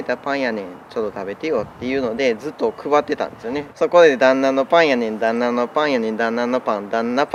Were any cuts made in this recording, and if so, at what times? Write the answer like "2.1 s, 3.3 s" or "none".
none